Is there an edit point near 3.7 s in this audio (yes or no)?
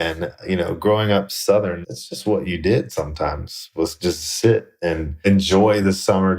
no